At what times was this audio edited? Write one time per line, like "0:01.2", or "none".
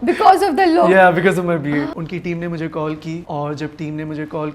0:01.9
0:03.2